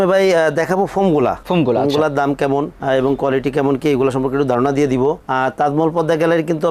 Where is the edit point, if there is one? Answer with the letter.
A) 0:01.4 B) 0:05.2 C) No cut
C